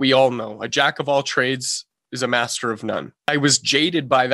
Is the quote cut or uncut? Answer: cut